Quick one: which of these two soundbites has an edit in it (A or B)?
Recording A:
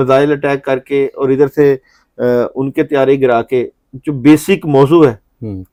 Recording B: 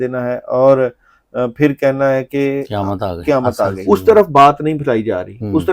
B